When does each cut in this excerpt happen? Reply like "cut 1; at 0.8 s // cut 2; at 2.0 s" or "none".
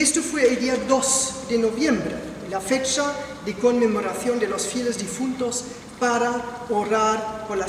cut 1; at 1.3 s